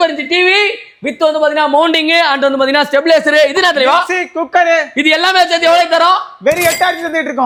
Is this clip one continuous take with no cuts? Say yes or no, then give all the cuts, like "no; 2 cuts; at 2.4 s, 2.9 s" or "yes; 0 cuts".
yes; 0 cuts